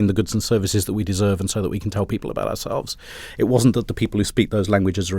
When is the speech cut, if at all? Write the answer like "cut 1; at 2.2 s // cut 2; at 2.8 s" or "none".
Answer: none